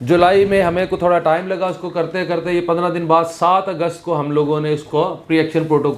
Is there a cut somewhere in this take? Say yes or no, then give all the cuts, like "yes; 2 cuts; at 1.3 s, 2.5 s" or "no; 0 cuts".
no; 0 cuts